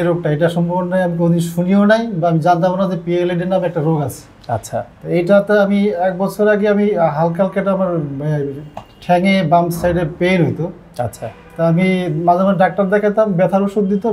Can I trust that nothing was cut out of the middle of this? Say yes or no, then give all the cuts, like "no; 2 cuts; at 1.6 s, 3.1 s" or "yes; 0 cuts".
yes; 0 cuts